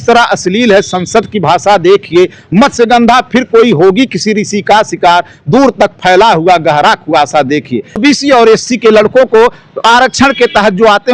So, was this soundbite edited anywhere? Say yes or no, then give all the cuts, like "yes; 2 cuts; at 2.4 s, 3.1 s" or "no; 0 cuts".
yes; 1 cut; at 8.0 s